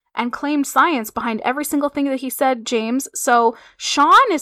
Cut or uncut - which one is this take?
uncut